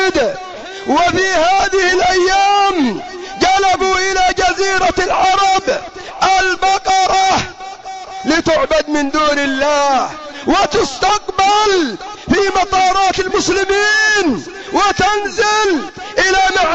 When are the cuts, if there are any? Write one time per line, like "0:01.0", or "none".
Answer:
none